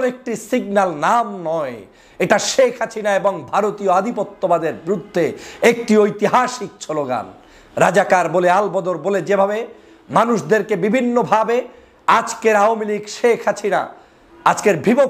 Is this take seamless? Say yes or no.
yes